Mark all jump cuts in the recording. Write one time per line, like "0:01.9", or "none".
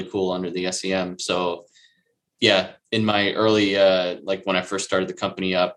none